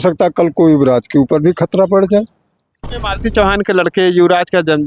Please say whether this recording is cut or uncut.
cut